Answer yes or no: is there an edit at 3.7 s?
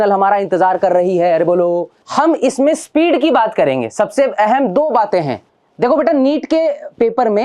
no